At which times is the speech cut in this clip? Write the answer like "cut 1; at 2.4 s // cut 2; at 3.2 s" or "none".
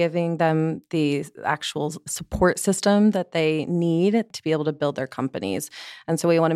cut 1; at 2.1 s // cut 2; at 4.3 s